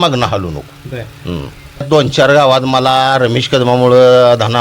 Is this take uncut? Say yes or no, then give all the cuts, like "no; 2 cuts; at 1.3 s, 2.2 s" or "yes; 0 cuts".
no; 1 cut; at 1.8 s